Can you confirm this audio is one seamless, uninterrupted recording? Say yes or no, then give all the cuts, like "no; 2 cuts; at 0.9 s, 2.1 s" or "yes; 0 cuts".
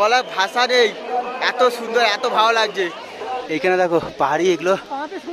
no; 1 cut; at 3.4 s